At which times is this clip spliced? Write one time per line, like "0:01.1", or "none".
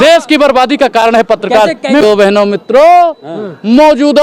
0:02.0

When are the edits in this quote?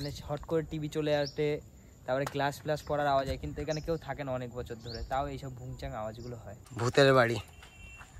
0:06.7

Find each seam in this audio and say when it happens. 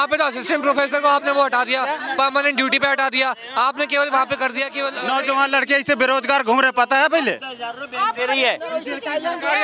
0:04.9

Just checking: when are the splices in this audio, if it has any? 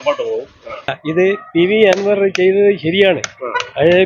0:01.0

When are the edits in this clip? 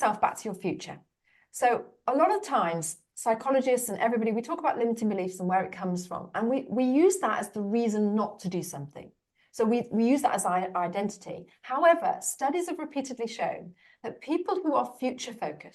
0:02.0

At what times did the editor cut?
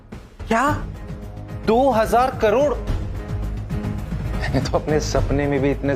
0:04.3

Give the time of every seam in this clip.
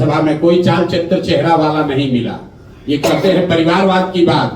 none

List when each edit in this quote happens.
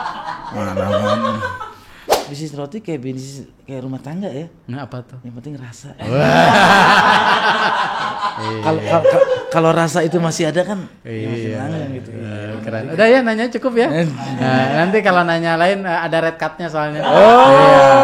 0:02.1

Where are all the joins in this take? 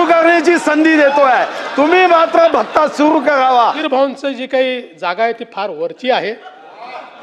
0:03.8

